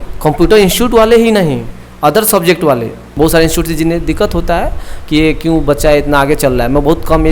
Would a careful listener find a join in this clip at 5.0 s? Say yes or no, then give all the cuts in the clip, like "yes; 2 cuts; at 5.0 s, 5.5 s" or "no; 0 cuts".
no; 1 cut; at 3.0 s